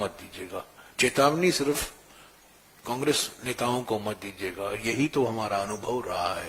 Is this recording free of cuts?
yes; 0 cuts

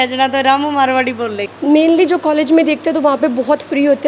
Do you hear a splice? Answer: yes; 1 cut; at 1.4 s

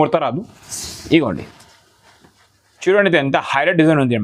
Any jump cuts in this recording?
yes; 1 cut; at 2.9 s

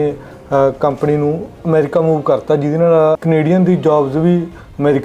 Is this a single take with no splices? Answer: no; 2 cuts; at 1.6 s, 3.2 s

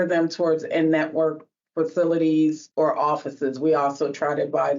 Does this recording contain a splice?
yes; 1 cut; at 2.6 s

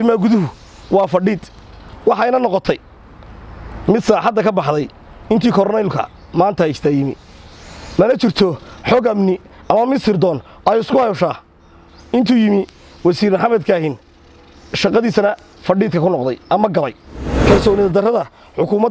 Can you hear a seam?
yes; 1 cut; at 17.3 s

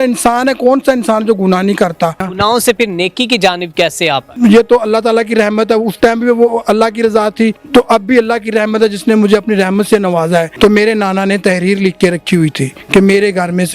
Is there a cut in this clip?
yes; 5 cuts; at 2.3 s, 4.3 s, 7.6 s, 10.5 s, 12.7 s

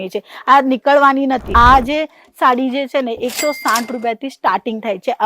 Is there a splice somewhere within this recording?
yes; 1 cut; at 1.5 s

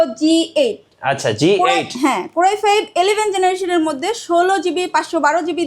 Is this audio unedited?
yes; 0 cuts

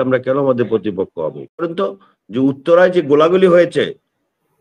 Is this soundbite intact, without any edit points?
no; 1 cut; at 1.6 s

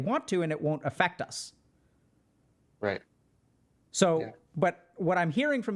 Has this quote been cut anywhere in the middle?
no; 0 cuts

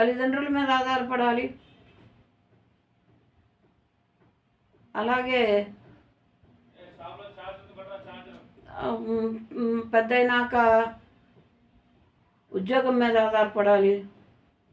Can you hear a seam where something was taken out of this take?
no; 0 cuts

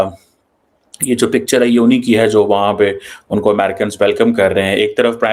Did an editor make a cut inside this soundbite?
no; 0 cuts

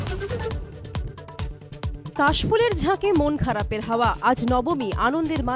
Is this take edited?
yes; 1 cut; at 1.0 s

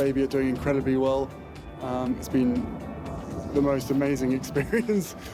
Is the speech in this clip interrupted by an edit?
no; 0 cuts

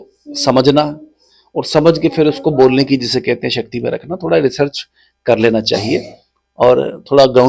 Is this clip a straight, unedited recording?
yes; 0 cuts

